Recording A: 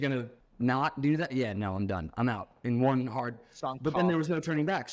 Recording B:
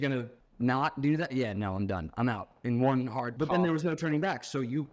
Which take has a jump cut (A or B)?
B